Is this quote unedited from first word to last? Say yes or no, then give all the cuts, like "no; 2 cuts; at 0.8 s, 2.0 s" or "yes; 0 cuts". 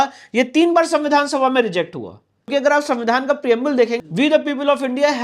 no; 2 cuts; at 2.5 s, 4.0 s